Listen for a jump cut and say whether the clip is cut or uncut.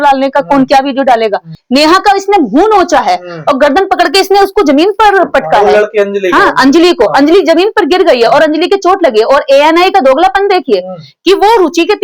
cut